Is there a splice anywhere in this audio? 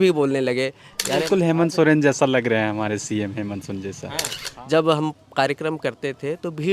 yes; 2 cuts; at 1.2 s, 4.4 s

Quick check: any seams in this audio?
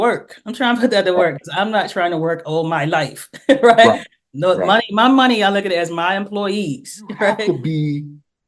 yes; 1 cut; at 7.4 s

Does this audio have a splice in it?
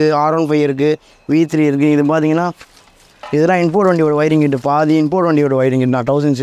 no; 0 cuts

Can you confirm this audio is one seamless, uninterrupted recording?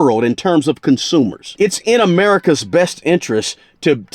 no; 1 cut; at 1.4 s

